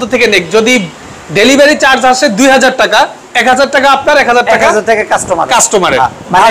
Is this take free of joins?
yes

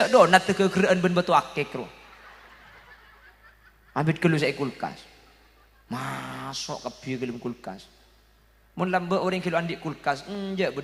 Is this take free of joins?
yes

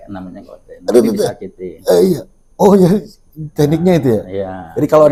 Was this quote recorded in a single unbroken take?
yes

